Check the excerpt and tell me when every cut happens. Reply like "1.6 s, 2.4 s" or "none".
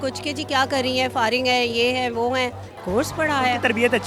2.8 s

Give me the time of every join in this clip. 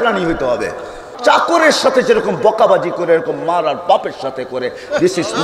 1.0 s

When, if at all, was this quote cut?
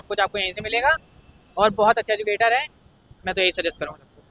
none

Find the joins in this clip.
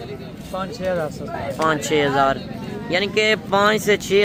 none

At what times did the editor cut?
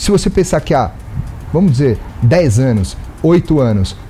none

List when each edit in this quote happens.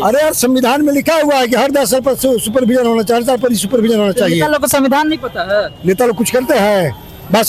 none

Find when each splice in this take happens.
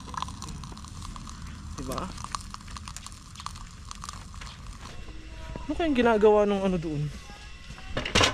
4.9 s

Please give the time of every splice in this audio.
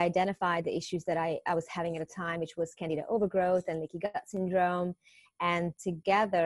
none

